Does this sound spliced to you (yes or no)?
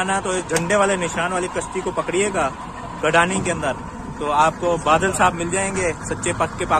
no